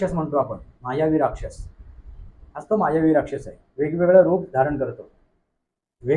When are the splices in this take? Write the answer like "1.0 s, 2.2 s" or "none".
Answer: none